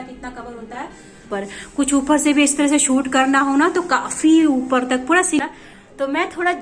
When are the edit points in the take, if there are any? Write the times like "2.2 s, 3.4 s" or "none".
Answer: 1.3 s, 5.4 s